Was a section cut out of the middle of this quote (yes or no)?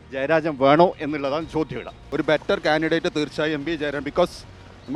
yes